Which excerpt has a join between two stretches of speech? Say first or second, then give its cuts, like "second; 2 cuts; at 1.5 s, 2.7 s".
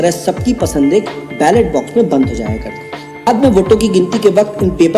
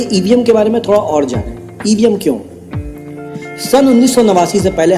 first; 1 cut; at 3.3 s